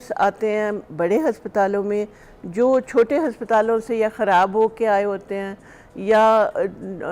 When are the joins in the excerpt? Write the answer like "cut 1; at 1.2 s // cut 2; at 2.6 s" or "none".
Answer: none